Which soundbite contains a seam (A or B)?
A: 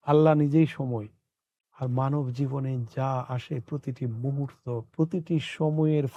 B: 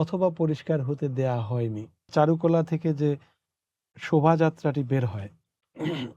B